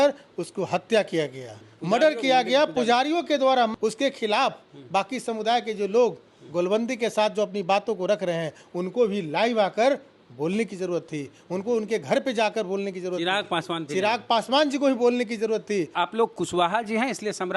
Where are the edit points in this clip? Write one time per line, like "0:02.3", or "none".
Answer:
0:03.7
0:15.9